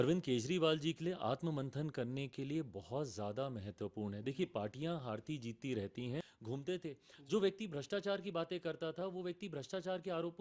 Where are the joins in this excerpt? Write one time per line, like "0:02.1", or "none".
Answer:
0:06.3